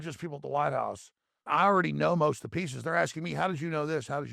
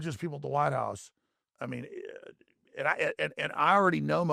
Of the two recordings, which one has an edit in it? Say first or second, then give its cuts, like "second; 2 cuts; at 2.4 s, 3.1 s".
first; 1 cut; at 1.4 s